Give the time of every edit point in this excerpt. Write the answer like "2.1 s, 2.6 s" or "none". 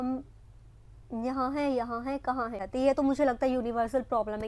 2.6 s